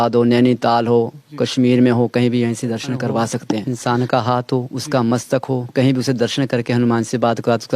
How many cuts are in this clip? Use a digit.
1